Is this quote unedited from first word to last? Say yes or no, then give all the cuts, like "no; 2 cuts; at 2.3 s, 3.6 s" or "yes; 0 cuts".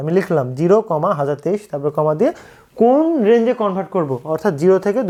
yes; 0 cuts